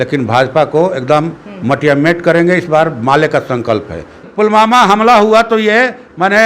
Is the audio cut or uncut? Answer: cut